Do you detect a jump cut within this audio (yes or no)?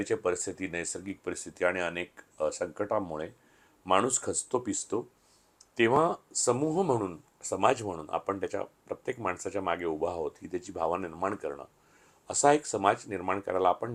no